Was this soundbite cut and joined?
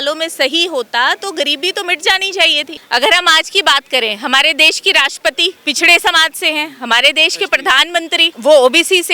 yes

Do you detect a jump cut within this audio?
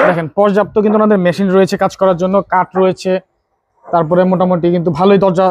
no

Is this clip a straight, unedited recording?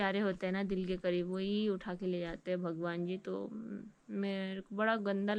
yes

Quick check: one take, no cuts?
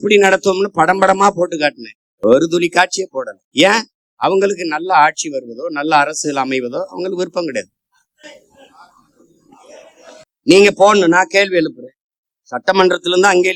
yes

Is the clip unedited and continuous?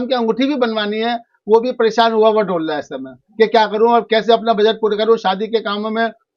yes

